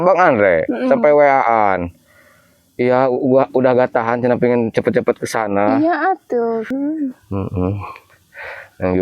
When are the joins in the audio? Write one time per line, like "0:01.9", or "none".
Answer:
0:06.7